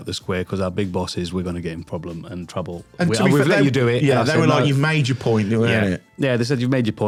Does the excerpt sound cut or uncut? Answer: uncut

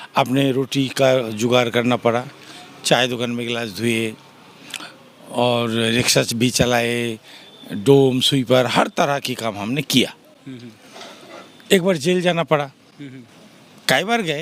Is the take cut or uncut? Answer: uncut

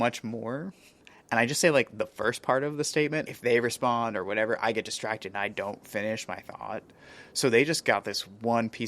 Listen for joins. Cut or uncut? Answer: cut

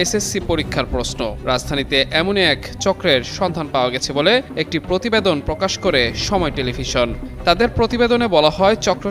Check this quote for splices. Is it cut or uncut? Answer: uncut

